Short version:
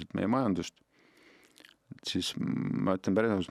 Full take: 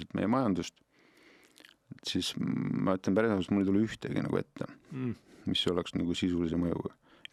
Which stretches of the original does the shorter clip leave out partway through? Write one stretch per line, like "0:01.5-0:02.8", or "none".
none